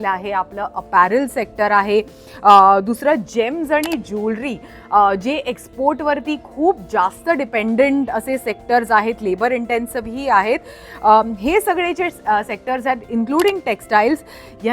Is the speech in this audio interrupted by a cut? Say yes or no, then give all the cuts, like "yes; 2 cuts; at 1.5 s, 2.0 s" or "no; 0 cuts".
no; 0 cuts